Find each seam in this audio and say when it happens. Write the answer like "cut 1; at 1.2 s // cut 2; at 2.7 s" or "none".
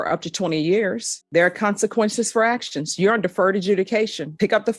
cut 1; at 1.2 s